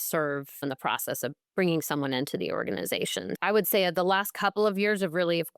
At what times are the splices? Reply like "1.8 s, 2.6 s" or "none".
3.4 s